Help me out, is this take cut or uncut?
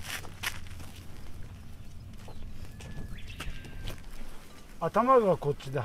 cut